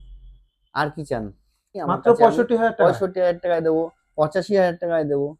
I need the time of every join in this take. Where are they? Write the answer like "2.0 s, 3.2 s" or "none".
1.8 s